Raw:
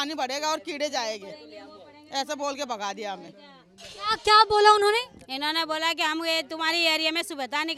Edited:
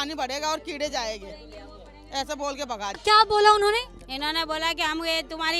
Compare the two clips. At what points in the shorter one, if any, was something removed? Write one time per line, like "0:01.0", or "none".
0:03.0